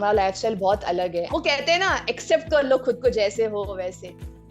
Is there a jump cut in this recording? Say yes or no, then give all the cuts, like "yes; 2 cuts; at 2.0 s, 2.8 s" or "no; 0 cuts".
yes; 1 cut; at 1.3 s